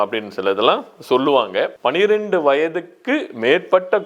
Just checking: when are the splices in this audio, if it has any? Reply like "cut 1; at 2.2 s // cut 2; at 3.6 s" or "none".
cut 1; at 1.7 s